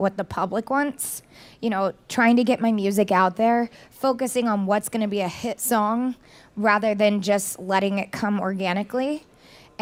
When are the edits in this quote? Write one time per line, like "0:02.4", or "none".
none